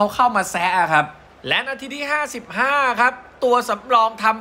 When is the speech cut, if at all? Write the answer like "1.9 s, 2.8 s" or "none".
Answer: 1.3 s